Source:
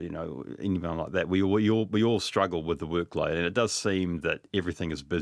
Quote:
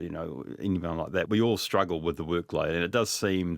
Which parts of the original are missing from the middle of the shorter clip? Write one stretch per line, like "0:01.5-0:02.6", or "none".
0:01.3-0:01.9